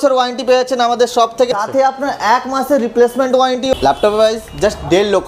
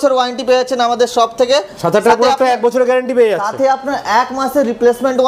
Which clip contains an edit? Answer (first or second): first